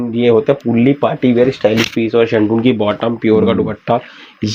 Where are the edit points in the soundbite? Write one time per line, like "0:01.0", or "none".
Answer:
none